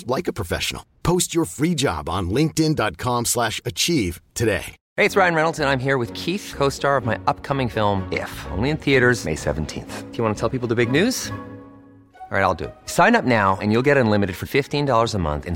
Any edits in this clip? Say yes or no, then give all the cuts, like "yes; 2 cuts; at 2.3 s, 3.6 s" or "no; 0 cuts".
yes; 1 cut; at 4.8 s